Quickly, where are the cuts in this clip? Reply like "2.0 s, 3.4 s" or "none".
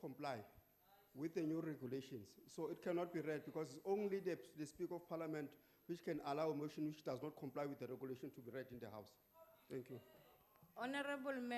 9.8 s